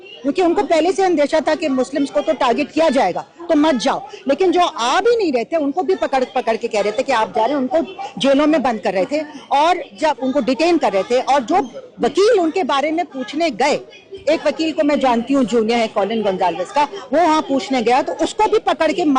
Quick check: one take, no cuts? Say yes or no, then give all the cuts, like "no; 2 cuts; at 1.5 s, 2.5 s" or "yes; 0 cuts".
yes; 0 cuts